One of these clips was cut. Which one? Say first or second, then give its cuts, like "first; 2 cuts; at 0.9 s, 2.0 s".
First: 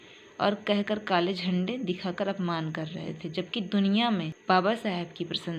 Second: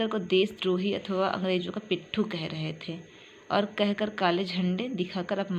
first; 1 cut; at 4.3 s